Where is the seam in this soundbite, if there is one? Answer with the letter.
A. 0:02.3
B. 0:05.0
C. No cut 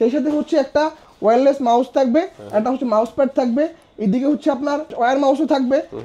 B